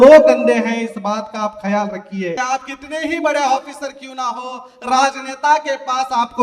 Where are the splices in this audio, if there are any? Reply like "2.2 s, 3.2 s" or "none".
2.4 s